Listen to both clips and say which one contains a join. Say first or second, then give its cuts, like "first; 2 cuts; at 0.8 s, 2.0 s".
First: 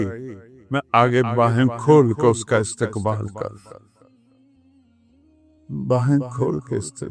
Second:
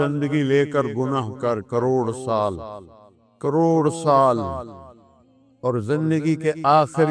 first; 2 cuts; at 3.8 s, 5.7 s